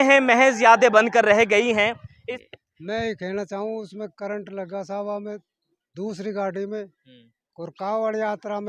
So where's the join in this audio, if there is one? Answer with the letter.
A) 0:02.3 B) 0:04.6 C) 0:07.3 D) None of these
A